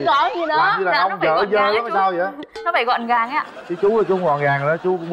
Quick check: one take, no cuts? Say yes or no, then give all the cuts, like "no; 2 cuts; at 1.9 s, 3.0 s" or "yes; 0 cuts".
yes; 0 cuts